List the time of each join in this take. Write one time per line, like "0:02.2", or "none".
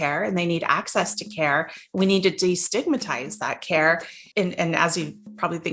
0:04.2